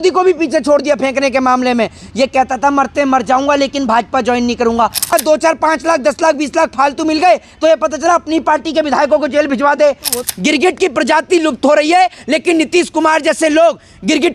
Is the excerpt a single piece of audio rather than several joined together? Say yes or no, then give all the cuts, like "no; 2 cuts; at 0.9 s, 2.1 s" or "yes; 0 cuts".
no; 2 cuts; at 5.1 s, 10.2 s